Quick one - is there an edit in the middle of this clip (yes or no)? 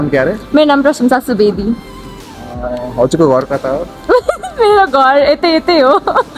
no